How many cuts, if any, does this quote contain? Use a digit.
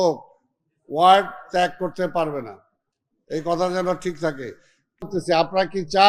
1